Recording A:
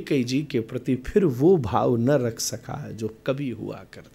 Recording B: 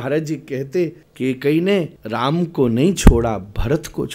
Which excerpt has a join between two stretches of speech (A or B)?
B